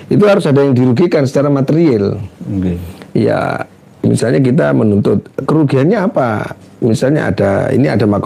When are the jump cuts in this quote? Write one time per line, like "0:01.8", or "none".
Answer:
none